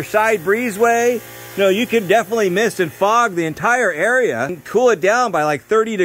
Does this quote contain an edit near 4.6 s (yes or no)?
yes